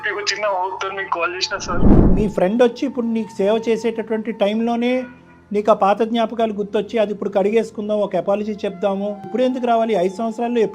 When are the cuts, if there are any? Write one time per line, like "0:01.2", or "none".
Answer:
0:02.1
0:09.3